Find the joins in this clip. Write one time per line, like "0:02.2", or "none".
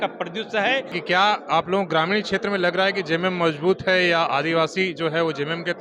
0:01.0